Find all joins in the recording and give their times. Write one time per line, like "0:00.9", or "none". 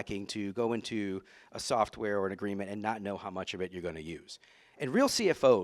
none